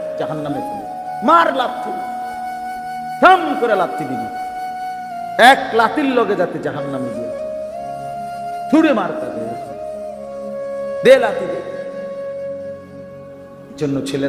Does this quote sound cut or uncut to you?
cut